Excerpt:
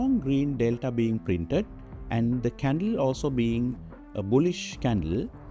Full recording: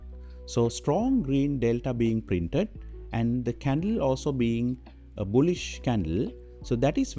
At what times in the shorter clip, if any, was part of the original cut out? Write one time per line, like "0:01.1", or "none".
none